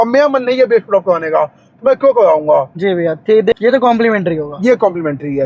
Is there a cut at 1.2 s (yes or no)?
no